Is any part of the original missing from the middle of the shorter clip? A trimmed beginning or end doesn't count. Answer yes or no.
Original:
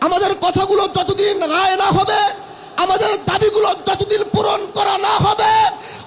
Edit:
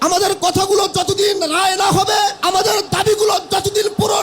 yes